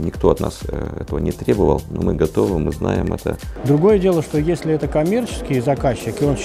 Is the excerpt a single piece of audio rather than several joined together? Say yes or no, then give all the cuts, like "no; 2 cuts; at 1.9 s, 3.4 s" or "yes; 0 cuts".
no; 1 cut; at 3.5 s